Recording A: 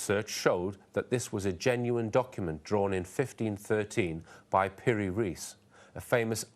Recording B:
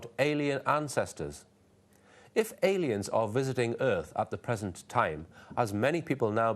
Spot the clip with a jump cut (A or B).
B